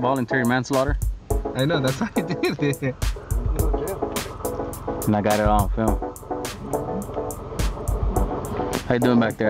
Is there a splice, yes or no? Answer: yes